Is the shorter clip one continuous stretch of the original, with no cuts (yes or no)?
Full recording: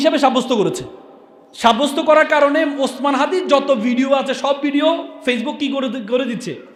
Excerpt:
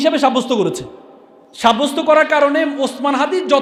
yes